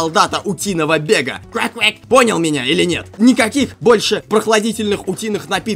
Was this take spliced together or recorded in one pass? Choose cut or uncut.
cut